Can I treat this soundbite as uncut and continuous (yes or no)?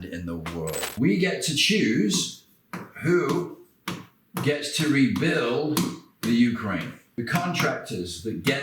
no